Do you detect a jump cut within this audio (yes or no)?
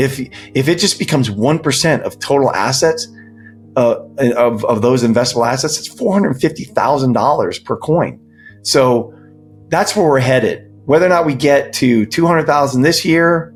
no